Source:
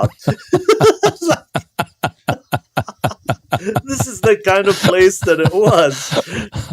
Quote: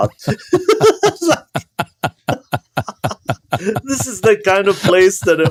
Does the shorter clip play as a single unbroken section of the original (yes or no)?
yes